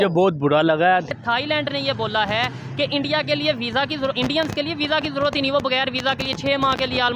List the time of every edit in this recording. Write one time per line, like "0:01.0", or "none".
0:01.1